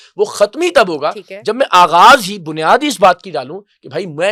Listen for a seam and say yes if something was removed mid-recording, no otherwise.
no